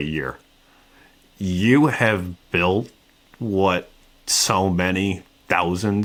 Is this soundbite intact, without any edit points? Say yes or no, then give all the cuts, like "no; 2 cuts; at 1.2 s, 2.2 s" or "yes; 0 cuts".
yes; 0 cuts